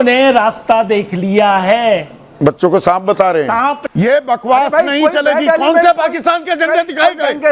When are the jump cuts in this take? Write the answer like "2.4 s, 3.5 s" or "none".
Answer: 3.8 s